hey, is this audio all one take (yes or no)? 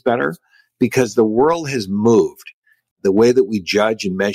yes